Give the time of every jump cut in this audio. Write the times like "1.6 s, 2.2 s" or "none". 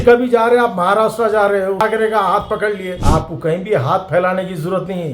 1.8 s, 3.0 s